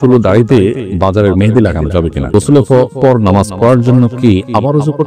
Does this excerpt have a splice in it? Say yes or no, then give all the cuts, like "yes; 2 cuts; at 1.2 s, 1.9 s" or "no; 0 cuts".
yes; 2 cuts; at 0.9 s, 2.3 s